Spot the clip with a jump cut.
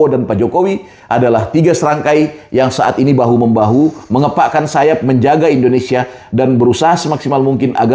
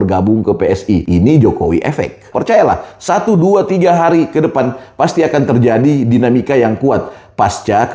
second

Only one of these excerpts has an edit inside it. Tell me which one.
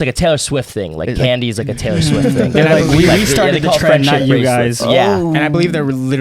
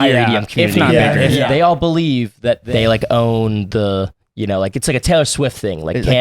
second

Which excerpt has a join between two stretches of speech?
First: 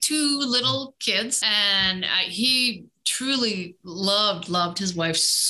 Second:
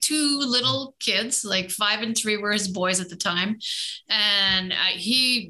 first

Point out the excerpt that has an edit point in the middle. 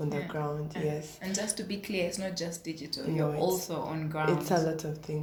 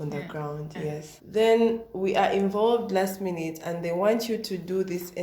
second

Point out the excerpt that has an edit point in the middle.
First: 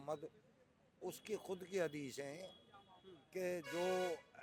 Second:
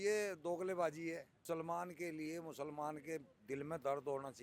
second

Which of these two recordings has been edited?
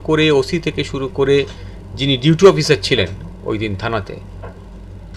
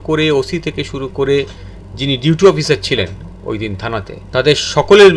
second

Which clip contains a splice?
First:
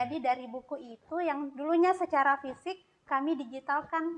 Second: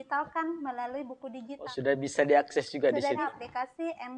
second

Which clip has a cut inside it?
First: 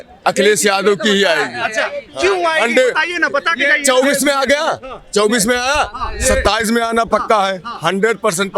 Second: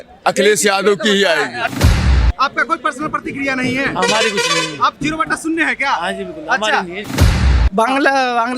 second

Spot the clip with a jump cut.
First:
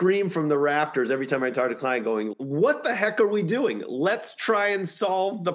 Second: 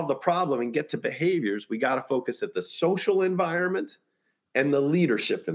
first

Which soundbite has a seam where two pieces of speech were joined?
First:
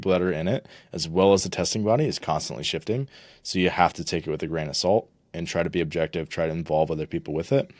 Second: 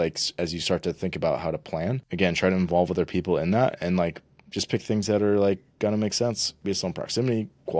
second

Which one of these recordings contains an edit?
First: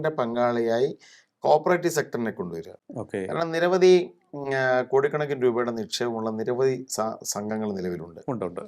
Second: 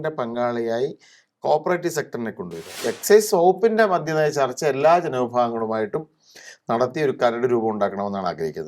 second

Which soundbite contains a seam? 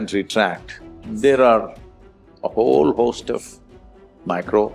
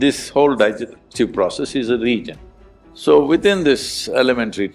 second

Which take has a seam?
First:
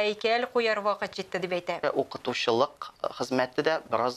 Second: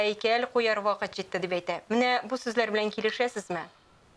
first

